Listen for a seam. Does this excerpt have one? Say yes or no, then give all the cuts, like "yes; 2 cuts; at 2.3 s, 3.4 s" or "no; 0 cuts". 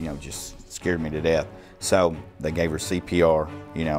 yes; 1 cut; at 2.4 s